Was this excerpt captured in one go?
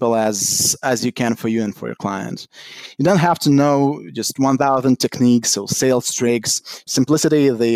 no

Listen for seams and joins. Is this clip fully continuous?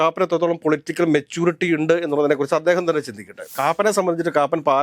no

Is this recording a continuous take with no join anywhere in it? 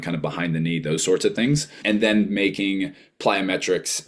no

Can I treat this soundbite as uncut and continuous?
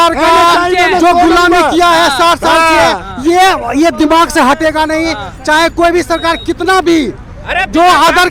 yes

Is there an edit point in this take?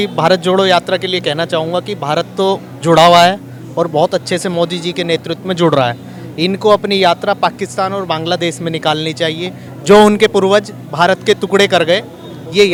no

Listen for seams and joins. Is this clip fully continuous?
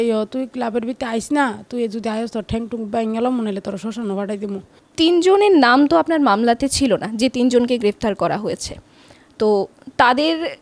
no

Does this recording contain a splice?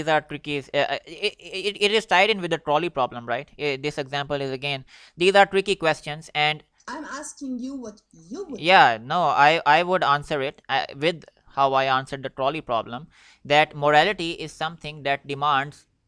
no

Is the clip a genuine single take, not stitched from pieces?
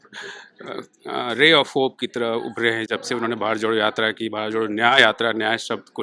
yes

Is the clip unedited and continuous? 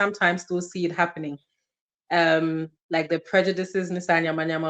yes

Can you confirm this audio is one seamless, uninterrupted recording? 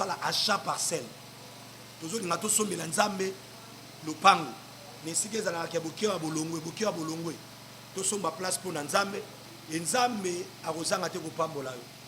yes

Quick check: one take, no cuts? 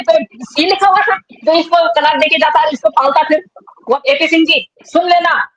no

